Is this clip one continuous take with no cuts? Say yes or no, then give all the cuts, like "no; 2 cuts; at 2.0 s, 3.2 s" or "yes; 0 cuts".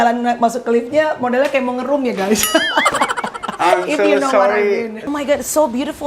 no; 1 cut; at 5.0 s